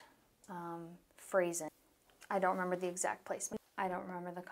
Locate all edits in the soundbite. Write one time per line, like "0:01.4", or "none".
0:01.6
0:03.5